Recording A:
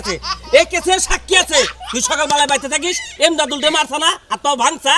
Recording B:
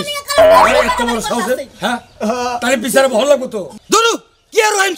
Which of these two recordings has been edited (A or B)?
B